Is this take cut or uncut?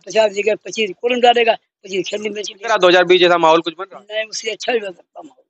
cut